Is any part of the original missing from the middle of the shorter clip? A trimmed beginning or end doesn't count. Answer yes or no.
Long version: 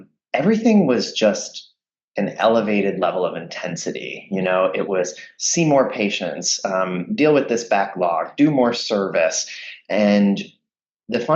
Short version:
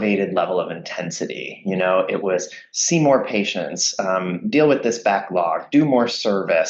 no